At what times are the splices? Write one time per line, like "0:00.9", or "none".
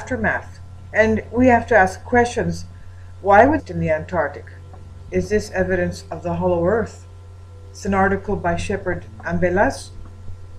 none

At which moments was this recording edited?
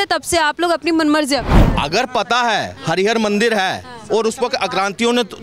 0:01.6

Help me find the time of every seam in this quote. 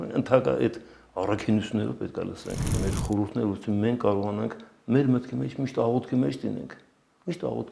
0:02.9

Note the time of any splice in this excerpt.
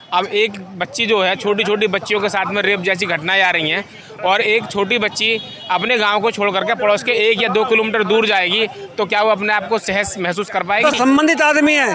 0:10.8

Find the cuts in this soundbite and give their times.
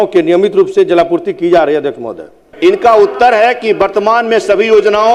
0:02.4

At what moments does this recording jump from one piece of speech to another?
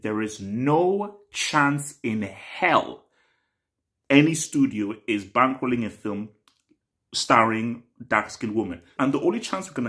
0:08.9

